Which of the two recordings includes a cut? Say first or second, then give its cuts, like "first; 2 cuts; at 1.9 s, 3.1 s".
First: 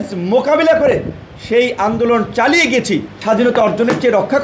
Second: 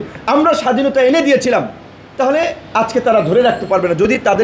first; 1 cut; at 3.1 s